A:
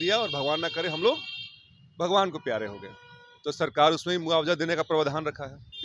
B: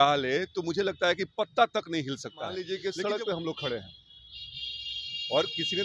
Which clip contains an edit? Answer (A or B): B